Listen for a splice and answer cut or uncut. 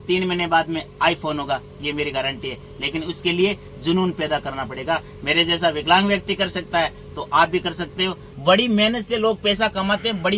cut